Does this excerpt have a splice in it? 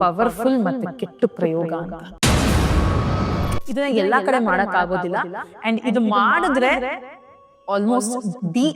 yes; 1 cut; at 3.6 s

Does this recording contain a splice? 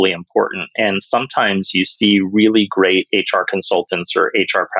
no; 0 cuts

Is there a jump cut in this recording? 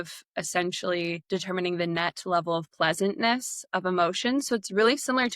yes; 1 cut; at 1.2 s

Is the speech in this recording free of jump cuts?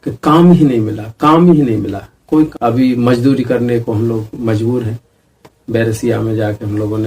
no; 1 cut; at 2.5 s

